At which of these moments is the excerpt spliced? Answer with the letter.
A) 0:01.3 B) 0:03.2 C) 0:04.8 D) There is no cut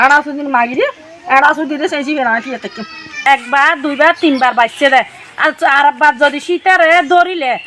B